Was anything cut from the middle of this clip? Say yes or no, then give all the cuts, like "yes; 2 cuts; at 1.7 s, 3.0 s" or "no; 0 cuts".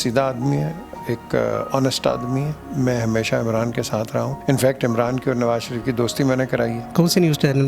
yes; 3 cuts; at 2.6 s, 4.3 s, 6.8 s